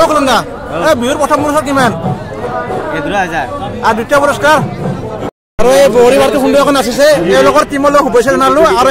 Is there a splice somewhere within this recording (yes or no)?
yes